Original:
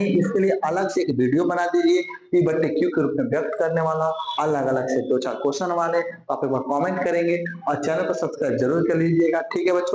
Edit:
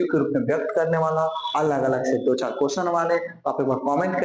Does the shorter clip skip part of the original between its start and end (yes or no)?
no